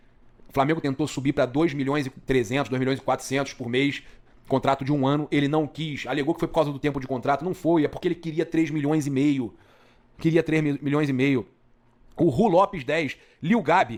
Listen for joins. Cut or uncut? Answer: uncut